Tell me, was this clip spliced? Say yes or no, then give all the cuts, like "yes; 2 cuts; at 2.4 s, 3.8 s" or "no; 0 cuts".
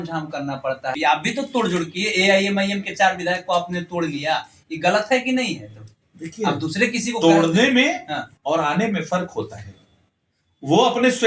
yes; 1 cut; at 0.9 s